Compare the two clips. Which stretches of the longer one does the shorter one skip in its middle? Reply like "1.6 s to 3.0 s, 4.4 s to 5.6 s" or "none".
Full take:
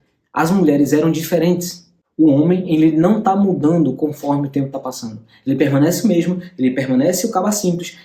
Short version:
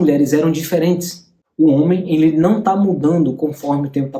none

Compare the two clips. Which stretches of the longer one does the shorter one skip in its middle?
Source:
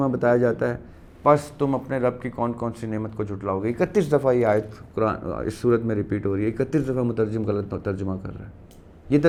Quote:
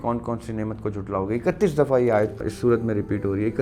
4.8 s to 5.5 s

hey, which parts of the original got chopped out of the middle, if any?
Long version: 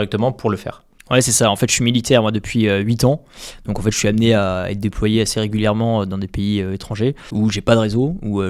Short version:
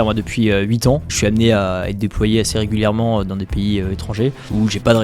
3.3 s to 4.0 s

